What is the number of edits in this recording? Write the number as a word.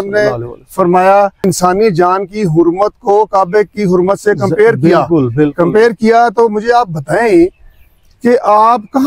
one